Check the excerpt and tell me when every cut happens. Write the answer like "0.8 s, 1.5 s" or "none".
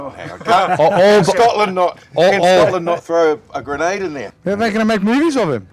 4.2 s